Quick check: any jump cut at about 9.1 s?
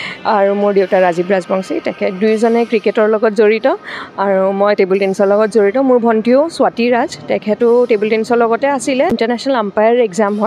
yes; 1 cut; at 9.1 s

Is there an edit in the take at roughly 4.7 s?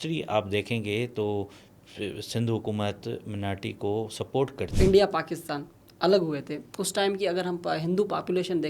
yes; 1 cut; at 4.7 s

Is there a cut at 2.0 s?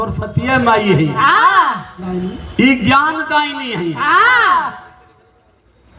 yes; 1 cut; at 2.0 s

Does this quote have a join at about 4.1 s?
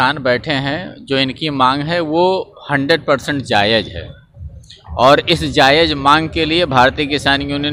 no; 0 cuts

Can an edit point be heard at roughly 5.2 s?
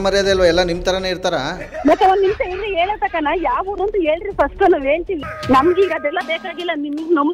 yes; 1 cut; at 5.2 s

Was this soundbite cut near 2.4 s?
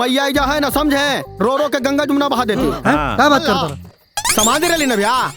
no; 1 cut; at 4.2 s

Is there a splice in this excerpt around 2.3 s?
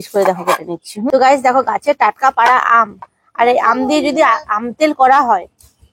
no; 1 cut; at 1.1 s

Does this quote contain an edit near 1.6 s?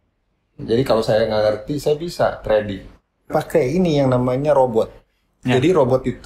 no; 1 cut; at 3.3 s

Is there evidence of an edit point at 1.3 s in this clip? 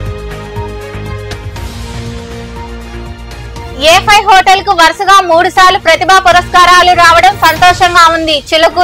yes; 1 cut; at 1.3 s

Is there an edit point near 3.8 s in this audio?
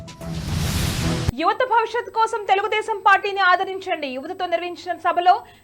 no; 1 cut; at 1.3 s

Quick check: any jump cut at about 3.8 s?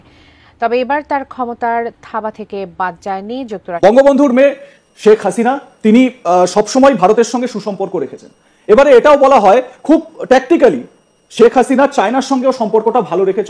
yes; 1 cut; at 3.8 s

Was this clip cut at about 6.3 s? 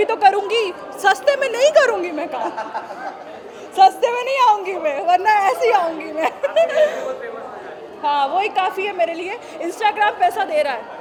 no; 0 cuts

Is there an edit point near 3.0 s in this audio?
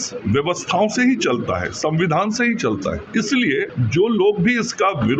yes; 2 cuts; at 3.0 s, 3.8 s

